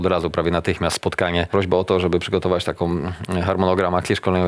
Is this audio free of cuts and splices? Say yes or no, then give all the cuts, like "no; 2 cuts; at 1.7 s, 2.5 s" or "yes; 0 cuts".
no; 1 cut; at 1.5 s